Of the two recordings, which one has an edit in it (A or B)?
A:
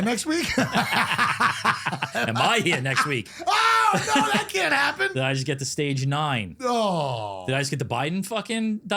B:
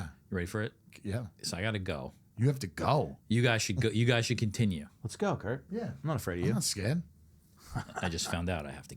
B